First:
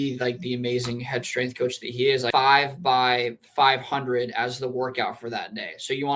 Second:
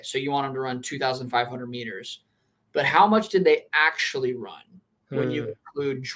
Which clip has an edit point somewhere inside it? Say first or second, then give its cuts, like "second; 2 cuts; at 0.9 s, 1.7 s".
first; 1 cut; at 2.3 s